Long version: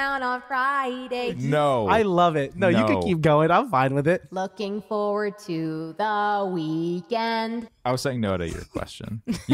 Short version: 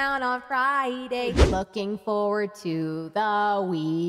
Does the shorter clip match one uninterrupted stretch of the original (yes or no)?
no